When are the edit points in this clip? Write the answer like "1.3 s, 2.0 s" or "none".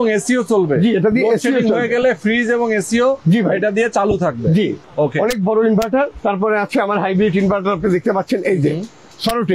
none